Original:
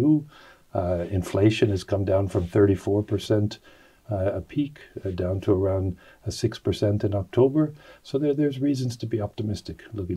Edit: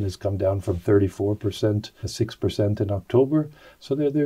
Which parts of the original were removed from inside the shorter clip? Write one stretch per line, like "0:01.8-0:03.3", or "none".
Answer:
0:03.6-0:06.2